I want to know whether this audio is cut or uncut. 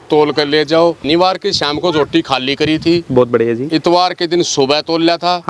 cut